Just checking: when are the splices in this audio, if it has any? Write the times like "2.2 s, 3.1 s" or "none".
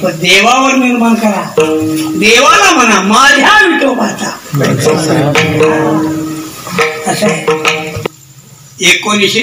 8.0 s